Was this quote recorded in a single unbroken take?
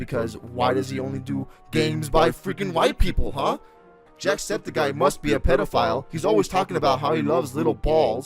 no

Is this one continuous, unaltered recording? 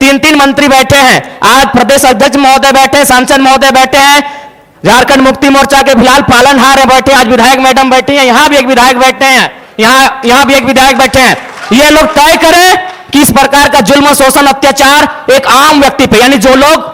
yes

